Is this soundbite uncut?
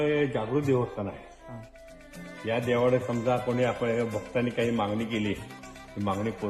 yes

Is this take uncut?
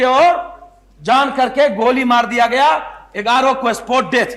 yes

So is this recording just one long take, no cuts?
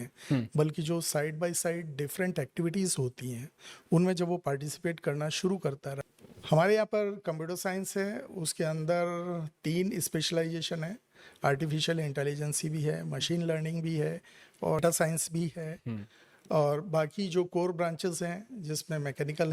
no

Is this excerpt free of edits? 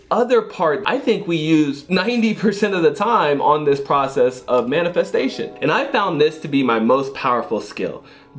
no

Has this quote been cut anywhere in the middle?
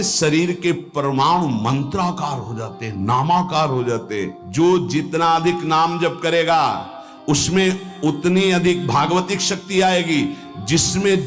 yes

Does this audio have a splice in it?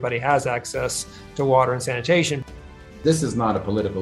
yes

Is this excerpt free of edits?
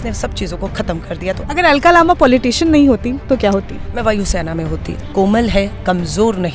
no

